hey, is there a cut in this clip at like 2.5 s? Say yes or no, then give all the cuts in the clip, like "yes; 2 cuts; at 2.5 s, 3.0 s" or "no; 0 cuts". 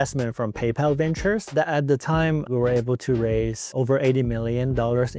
yes; 2 cuts; at 2.5 s, 3.7 s